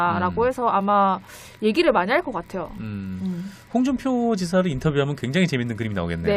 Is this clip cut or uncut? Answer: cut